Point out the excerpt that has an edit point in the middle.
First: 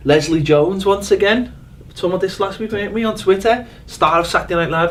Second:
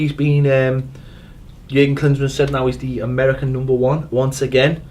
second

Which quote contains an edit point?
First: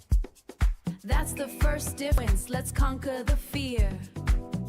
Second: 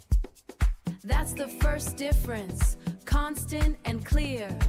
first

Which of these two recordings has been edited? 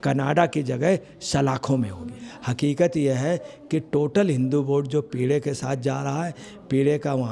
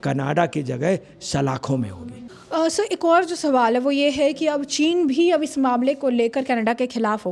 first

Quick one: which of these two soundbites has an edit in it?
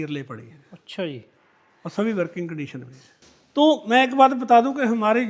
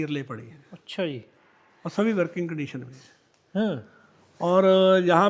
first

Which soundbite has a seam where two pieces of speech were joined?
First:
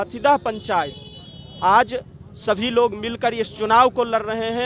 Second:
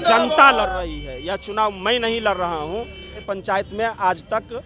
second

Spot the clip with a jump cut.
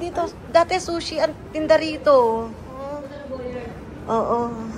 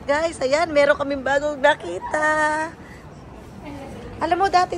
first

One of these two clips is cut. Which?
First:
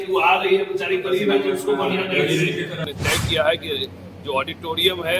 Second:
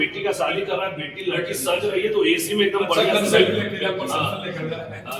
first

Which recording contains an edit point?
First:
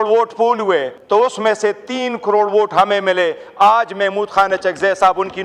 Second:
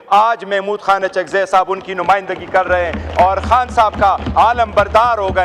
first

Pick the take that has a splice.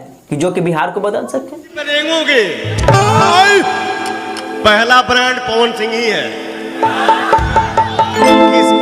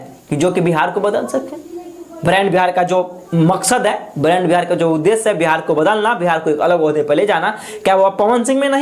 first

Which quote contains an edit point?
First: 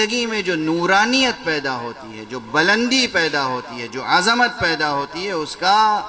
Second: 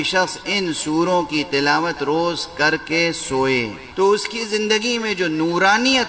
second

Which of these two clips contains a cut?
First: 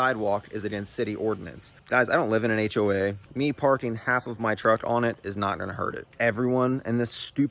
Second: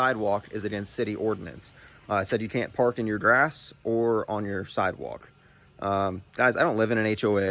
first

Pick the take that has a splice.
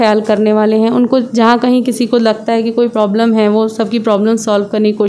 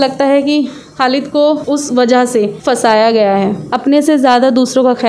second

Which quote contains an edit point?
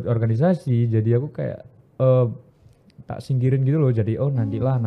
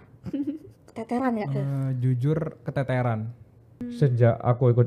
second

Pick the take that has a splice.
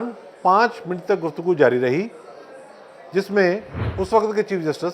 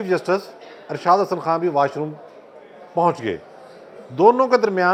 first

